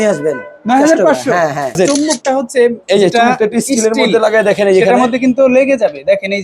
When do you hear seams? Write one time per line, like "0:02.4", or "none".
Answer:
0:02.0